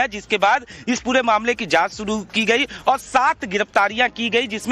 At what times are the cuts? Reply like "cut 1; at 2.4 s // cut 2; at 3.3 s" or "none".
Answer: cut 1; at 2.7 s